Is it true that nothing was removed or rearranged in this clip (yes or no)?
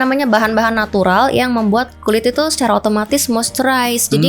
yes